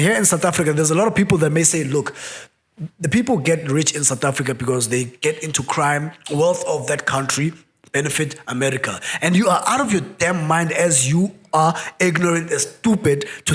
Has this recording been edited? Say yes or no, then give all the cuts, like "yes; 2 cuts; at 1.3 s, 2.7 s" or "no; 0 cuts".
yes; 1 cut; at 6.2 s